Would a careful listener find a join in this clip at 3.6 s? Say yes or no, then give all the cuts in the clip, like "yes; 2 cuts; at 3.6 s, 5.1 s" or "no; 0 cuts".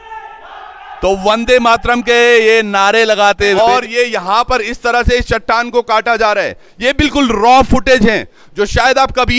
yes; 1 cut; at 3.6 s